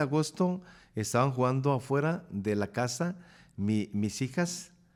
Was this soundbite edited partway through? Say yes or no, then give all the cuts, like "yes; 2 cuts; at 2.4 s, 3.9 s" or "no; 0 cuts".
no; 0 cuts